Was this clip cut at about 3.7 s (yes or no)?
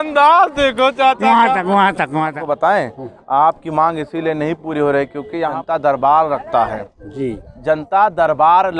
no